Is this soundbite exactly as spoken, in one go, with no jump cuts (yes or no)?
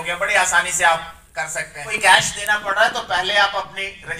no